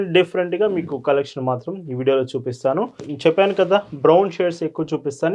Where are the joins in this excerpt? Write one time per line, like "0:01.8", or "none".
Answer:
0:03.1